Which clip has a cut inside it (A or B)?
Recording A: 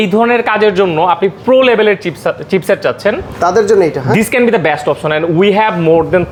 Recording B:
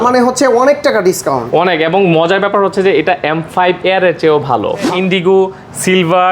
B